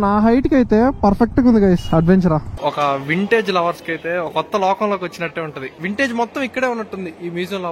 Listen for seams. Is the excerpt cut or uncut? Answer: cut